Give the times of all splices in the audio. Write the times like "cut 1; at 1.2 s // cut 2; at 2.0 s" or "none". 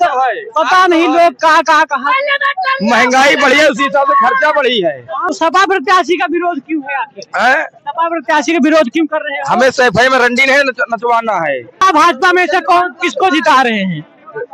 cut 1; at 5.2 s // cut 2; at 11.8 s